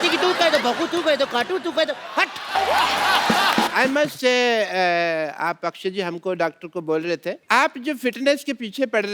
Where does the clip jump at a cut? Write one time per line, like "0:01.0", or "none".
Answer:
0:03.7
0:07.4